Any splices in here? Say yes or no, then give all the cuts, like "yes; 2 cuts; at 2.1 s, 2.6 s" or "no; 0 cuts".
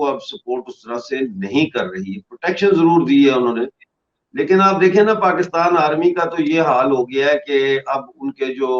no; 0 cuts